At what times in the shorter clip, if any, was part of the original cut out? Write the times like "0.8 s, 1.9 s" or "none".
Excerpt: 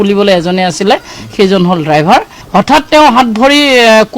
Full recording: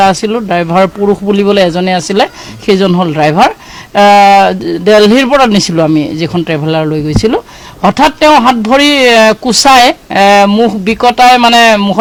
2.4 s